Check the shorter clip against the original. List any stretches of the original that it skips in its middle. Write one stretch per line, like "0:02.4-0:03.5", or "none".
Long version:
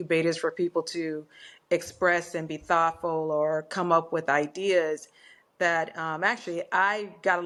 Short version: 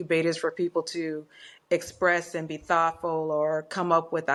none